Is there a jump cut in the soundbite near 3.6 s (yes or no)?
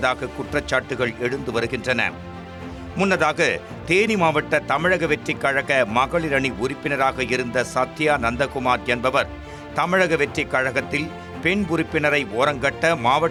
no